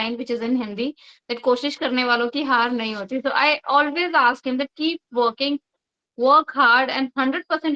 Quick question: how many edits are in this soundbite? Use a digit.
0